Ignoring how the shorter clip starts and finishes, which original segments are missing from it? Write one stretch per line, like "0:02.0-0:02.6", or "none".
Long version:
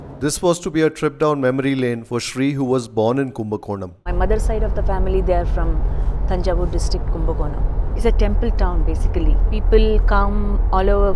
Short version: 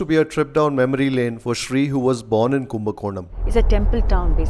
0:04.0-0:07.8